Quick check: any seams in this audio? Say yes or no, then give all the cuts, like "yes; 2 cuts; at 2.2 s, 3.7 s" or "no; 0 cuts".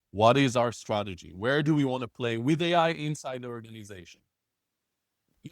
no; 0 cuts